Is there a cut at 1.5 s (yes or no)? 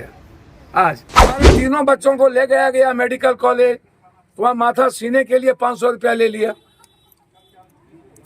yes